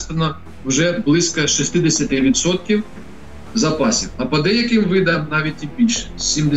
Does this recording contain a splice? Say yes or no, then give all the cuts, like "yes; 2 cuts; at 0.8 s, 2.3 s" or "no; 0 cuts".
no; 0 cuts